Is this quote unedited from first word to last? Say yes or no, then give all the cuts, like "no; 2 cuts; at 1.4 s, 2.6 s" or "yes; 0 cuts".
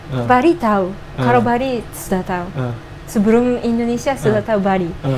yes; 0 cuts